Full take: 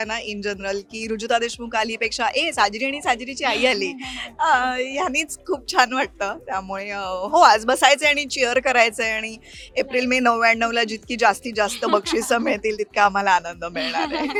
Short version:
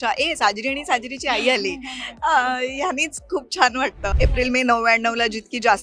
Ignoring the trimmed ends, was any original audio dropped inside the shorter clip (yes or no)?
yes